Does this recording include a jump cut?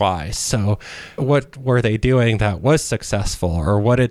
yes; 1 cut; at 1.2 s

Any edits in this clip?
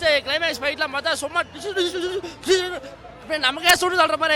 no; 0 cuts

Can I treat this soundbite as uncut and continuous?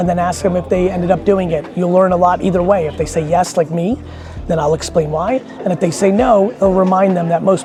yes; 0 cuts

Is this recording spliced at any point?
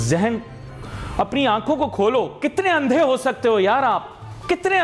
no; 0 cuts

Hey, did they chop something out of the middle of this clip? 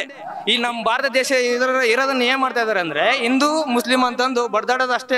no; 0 cuts

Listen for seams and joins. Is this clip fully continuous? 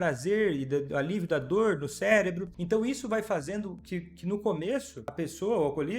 no; 2 cuts; at 2.5 s, 5.0 s

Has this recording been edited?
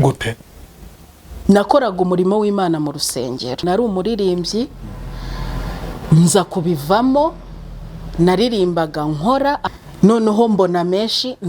yes; 2 cuts; at 3.6 s, 9.6 s

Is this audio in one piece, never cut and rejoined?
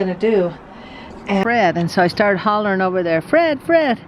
no; 1 cut; at 1.4 s

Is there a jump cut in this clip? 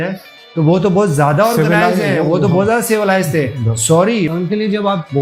yes; 1 cut; at 4.3 s

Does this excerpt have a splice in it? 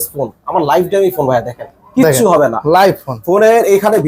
no; 0 cuts

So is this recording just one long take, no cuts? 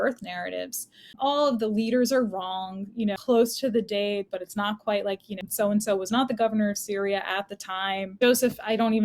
no; 4 cuts; at 1.2 s, 3.2 s, 5.4 s, 8.1 s

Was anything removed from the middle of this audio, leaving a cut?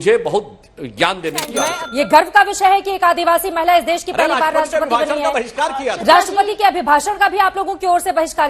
yes; 1 cut; at 1.7 s

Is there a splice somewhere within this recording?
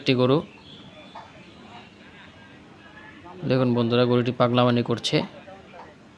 no; 0 cuts

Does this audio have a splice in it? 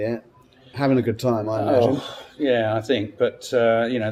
no; 0 cuts

